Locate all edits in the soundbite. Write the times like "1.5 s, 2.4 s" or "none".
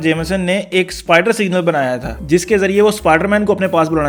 none